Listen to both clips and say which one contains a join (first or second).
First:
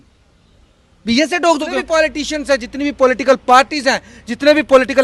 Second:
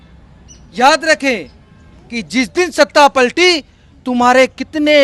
first